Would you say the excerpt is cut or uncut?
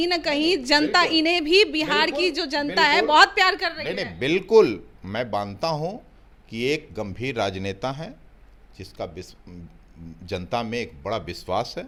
uncut